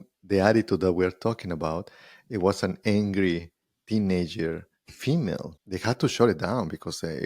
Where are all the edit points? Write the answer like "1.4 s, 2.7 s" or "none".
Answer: 5.5 s

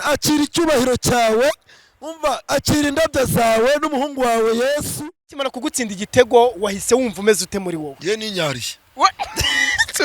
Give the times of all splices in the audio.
5.6 s

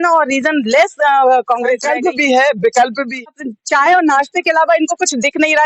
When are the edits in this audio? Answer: 1.9 s, 3.2 s

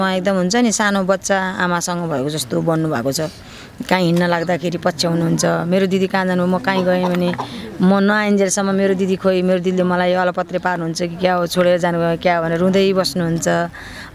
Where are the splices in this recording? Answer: none

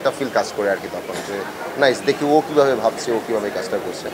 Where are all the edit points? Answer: none

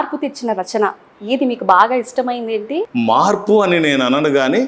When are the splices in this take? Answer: 2.9 s

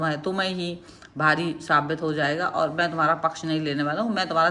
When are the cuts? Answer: none

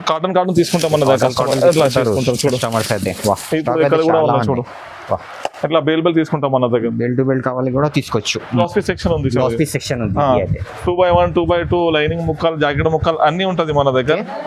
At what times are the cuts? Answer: 8.6 s

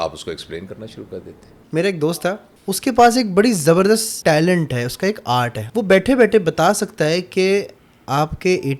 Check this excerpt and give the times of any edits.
2.0 s, 4.2 s, 5.6 s

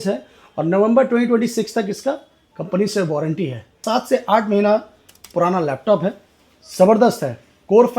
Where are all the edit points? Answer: 3.8 s

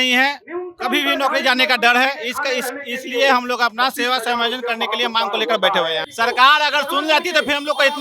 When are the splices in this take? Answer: 6.1 s

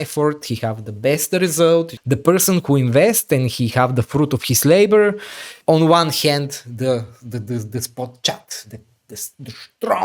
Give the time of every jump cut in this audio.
1.9 s, 5.5 s

